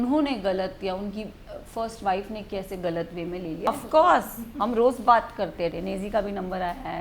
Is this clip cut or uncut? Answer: cut